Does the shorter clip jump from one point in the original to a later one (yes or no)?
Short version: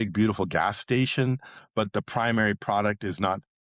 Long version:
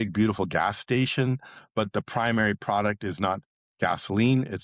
no